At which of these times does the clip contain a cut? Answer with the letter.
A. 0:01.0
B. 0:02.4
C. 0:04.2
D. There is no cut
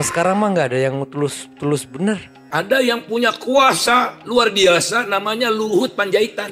B